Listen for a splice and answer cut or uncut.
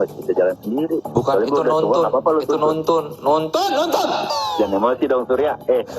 cut